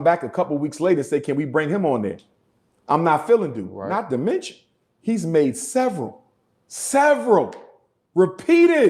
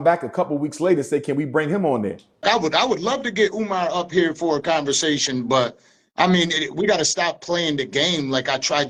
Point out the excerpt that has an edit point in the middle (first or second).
first